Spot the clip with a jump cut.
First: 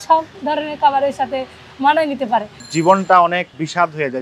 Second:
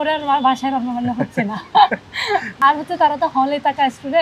first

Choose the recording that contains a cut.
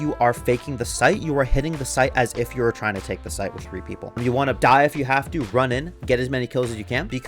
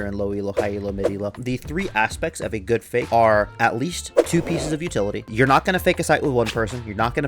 second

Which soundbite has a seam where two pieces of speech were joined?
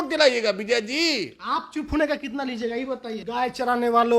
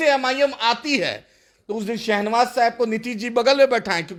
first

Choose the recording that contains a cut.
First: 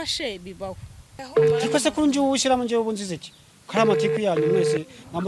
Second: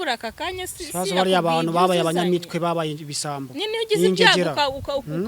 first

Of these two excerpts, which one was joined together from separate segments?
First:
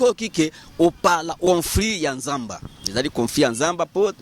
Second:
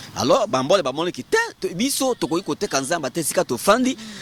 first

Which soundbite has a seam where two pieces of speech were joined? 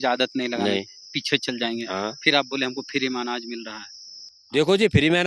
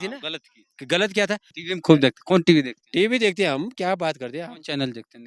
second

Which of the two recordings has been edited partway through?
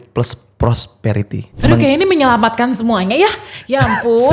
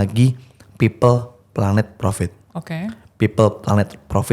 first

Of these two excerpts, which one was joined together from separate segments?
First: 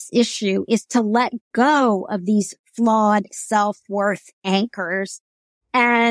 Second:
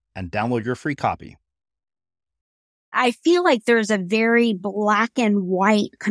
second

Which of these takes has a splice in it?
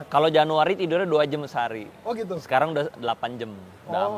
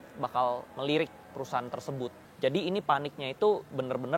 second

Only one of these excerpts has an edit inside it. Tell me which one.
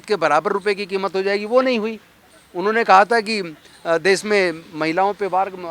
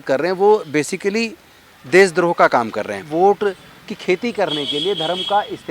second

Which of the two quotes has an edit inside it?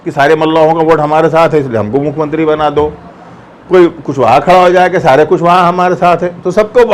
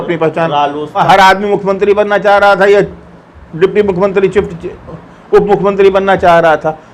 second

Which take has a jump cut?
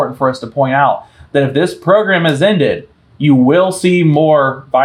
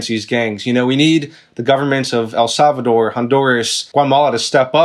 second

